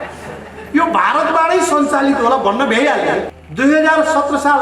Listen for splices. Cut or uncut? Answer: cut